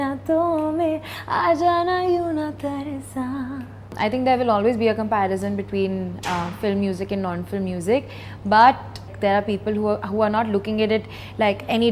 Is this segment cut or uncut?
cut